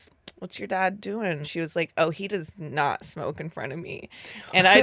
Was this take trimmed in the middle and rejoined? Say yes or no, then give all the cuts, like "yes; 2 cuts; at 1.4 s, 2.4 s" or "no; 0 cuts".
yes; 1 cut; at 1.5 s